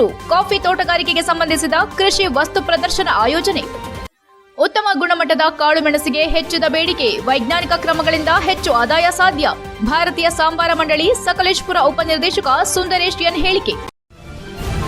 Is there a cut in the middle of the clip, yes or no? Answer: yes